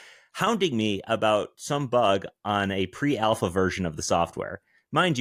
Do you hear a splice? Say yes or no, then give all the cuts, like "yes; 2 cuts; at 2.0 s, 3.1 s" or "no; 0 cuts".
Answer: no; 0 cuts